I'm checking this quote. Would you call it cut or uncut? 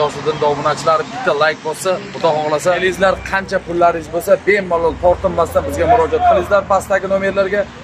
cut